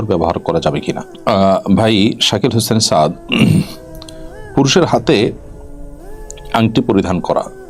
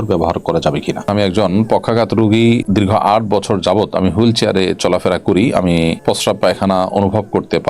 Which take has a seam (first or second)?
second